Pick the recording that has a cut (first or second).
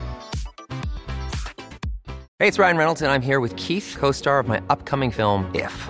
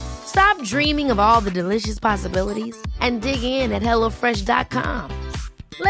first